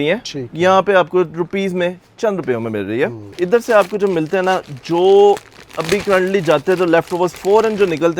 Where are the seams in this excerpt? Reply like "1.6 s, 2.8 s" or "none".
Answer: 3.2 s